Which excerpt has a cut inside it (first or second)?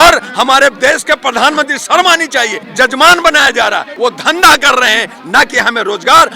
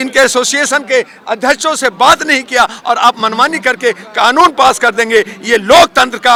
first